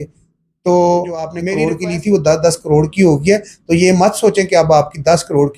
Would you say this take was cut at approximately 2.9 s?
no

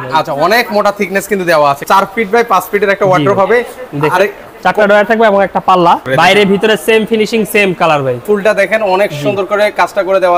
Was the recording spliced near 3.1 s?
no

